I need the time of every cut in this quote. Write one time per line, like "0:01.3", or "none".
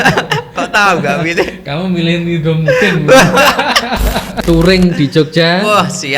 0:04.4